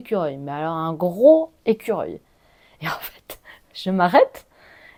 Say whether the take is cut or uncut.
uncut